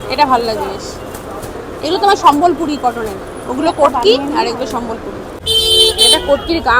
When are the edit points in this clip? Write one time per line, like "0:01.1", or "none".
0:05.3